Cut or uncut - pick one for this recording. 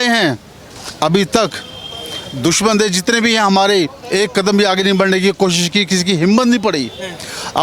uncut